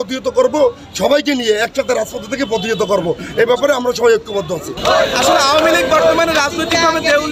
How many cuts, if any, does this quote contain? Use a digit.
1